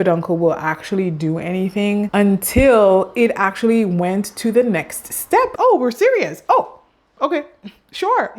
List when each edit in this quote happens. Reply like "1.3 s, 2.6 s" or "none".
2.1 s

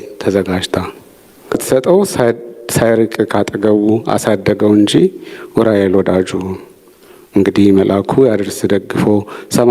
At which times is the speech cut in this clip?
1.6 s

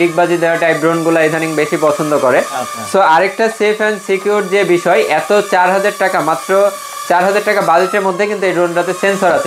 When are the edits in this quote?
none

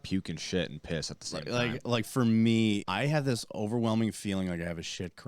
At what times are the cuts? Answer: 2.9 s

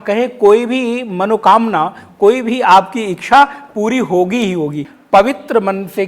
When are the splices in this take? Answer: 4.9 s

